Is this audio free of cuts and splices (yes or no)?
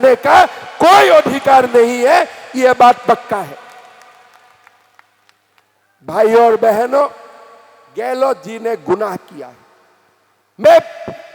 yes